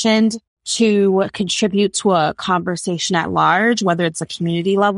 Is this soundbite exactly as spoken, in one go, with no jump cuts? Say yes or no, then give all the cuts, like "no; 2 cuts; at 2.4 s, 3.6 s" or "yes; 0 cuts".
yes; 0 cuts